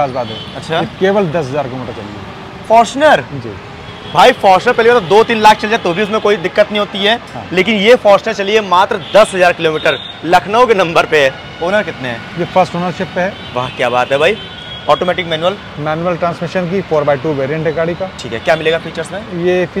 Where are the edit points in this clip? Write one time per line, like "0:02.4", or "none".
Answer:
none